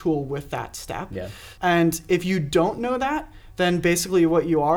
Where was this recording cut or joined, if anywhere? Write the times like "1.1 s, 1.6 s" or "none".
1.4 s